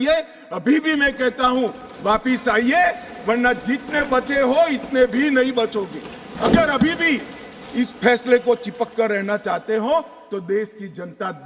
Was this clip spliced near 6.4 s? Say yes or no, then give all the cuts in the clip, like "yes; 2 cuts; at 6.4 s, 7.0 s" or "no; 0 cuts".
yes; 1 cut; at 6.4 s